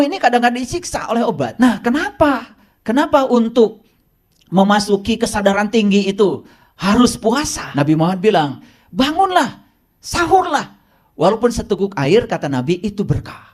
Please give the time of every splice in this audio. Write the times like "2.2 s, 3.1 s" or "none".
1.5 s, 7.6 s